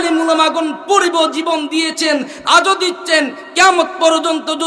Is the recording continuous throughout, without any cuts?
no; 1 cut; at 3.7 s

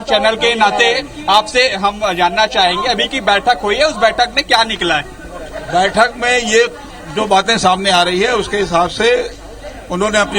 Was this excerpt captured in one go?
no; 1 cut; at 9.1 s

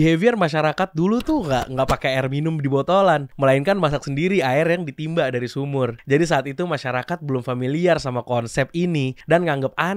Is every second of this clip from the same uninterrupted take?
yes; 0 cuts

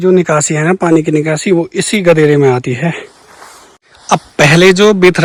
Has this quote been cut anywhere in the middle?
no; 0 cuts

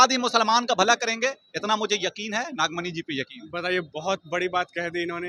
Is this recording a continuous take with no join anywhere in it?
yes; 0 cuts

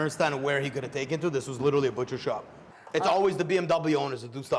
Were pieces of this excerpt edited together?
yes; 1 cut; at 2.6 s

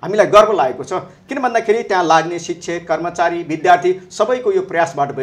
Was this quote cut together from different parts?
no; 0 cuts

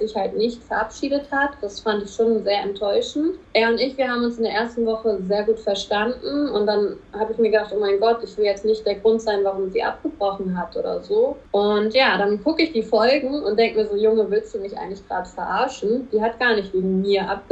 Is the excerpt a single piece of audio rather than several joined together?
yes; 0 cuts

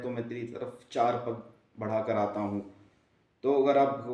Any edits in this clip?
no; 0 cuts

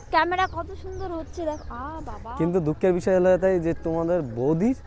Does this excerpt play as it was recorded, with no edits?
yes; 0 cuts

